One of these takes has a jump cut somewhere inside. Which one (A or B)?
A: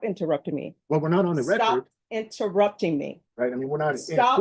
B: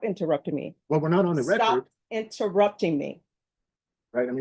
A